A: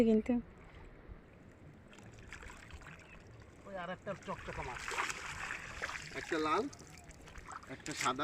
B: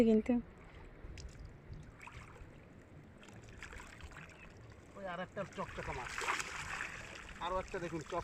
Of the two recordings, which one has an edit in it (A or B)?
A